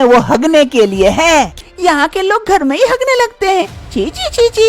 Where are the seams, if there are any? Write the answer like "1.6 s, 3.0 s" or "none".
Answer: 1.5 s